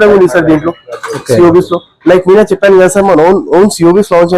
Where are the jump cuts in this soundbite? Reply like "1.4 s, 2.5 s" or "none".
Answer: none

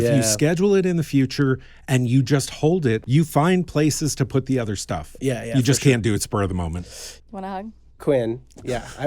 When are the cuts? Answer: 3.0 s, 7.0 s

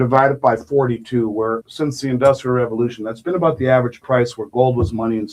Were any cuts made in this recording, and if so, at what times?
1.7 s

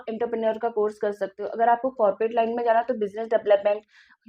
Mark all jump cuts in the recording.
none

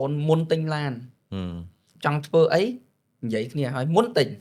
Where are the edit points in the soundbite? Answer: none

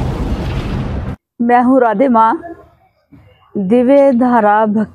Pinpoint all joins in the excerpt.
1.2 s

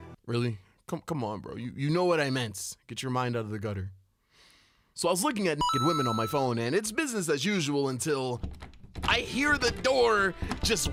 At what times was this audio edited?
none

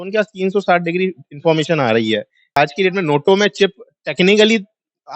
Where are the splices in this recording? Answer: 2.5 s

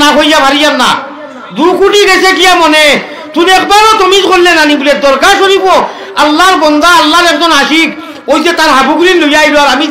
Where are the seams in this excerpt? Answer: none

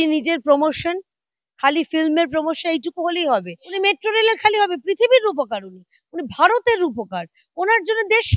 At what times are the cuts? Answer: 3.6 s

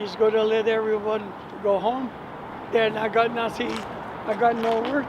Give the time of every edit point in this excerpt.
2.6 s

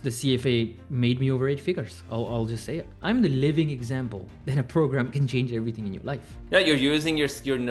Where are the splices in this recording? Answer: 2.9 s, 6.3 s

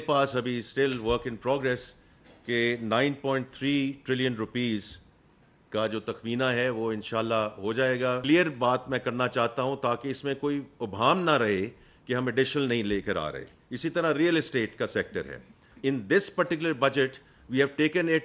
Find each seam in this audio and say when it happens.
8.2 s, 15.7 s

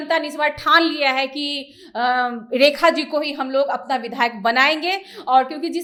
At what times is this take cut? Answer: none

